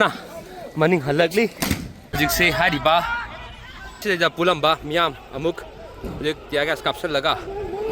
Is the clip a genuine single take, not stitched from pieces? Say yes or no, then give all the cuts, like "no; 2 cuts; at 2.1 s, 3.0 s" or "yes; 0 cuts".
no; 1 cut; at 2.2 s